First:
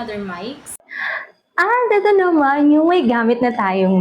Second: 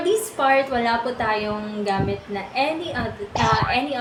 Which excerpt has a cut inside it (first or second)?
first